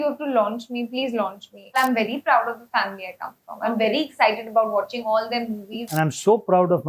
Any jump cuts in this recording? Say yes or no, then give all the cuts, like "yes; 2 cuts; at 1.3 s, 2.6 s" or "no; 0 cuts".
yes; 2 cuts; at 1.8 s, 5.9 s